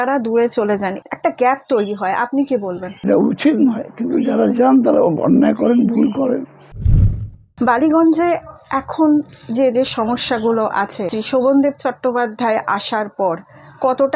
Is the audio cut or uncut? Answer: cut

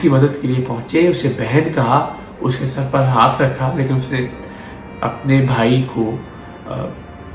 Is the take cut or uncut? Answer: uncut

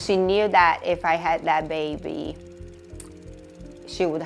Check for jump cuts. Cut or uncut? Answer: uncut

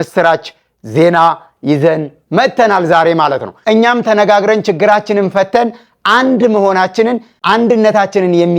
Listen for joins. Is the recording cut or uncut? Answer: cut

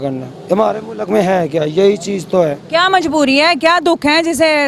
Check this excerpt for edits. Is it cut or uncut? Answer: uncut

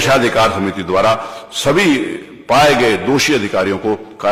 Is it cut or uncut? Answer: uncut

